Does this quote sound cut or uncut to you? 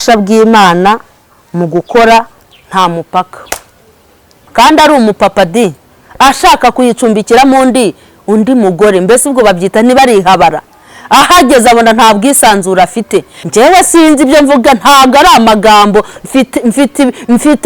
cut